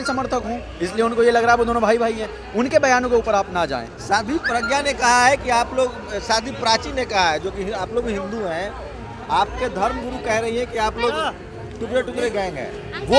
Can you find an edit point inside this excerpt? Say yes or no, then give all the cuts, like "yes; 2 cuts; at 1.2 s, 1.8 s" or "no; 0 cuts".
no; 0 cuts